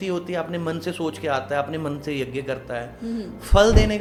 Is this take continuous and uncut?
yes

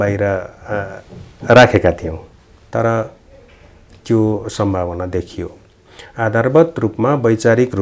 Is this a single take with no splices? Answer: yes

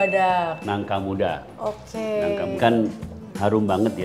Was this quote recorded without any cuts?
no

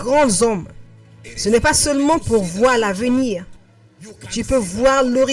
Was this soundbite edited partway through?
no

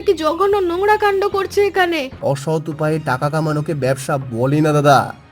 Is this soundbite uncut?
no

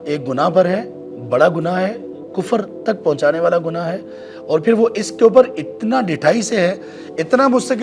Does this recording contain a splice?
no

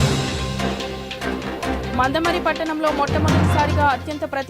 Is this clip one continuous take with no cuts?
no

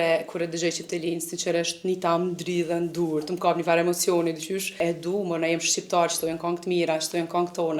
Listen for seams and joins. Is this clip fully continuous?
no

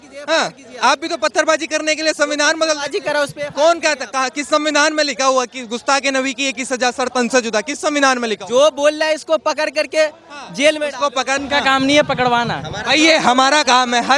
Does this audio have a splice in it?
no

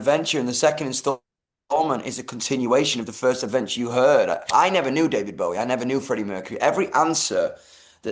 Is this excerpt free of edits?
no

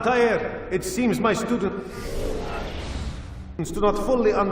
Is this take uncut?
yes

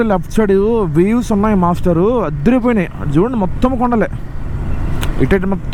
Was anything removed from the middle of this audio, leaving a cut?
no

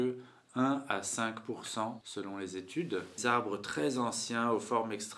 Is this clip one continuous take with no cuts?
no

